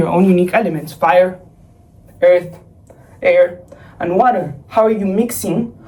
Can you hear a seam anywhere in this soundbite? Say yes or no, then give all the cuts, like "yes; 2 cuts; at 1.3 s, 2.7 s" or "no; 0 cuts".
no; 0 cuts